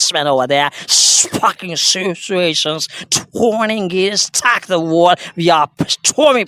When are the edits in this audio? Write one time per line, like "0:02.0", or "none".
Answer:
none

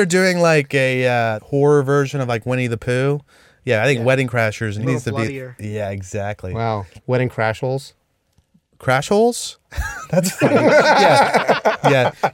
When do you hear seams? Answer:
0:01.4
0:04.8
0:06.9

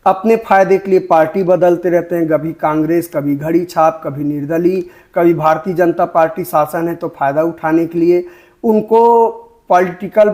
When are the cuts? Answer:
none

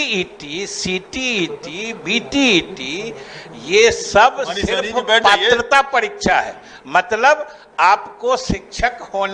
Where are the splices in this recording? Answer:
none

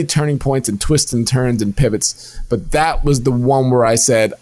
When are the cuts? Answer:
none

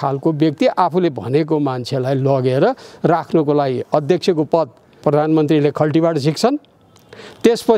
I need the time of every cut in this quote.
0:05.0

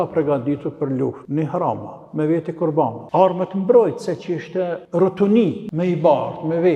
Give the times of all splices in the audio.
0:01.2
0:03.0
0:04.8
0:05.6

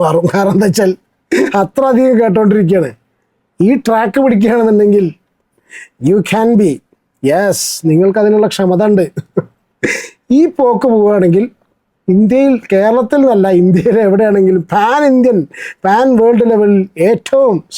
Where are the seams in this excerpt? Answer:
none

